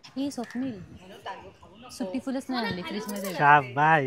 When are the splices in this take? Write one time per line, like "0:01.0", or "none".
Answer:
none